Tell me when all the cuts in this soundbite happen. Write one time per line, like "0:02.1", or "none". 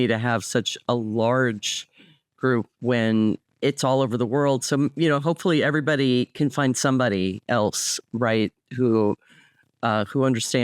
0:03.5